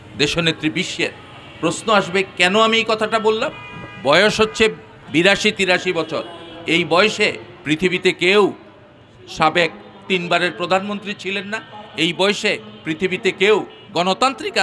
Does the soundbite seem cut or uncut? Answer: uncut